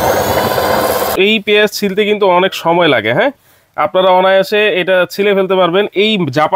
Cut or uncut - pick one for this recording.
cut